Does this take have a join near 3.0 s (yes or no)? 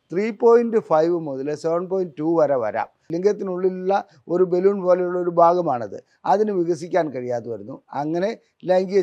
yes